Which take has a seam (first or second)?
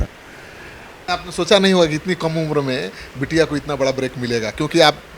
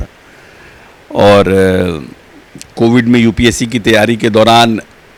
first